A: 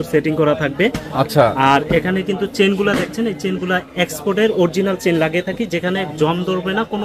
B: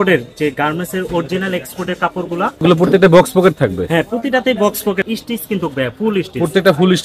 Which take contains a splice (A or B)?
B